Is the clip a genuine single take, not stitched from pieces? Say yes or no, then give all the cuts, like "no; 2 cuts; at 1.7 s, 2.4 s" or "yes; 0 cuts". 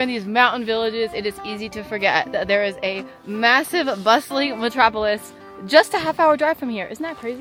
yes; 0 cuts